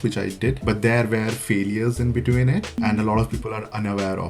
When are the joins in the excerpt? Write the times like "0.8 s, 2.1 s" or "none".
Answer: none